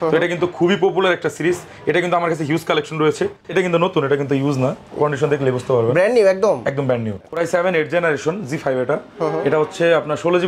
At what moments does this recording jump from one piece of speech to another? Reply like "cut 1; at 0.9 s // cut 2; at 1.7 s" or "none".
cut 1; at 3.4 s // cut 2; at 7.3 s